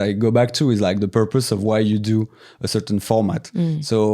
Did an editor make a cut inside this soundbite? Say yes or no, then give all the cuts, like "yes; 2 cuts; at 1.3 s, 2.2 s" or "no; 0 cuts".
no; 0 cuts